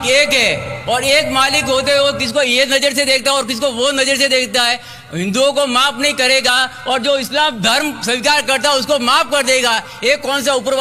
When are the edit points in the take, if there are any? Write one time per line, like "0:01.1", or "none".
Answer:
none